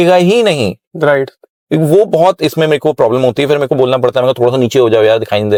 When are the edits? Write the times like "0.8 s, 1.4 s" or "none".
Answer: none